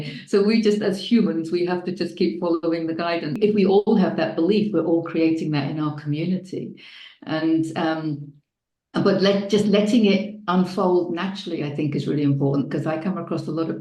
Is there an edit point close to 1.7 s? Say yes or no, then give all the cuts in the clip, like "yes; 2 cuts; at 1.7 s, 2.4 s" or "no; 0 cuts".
no; 1 cut; at 3.4 s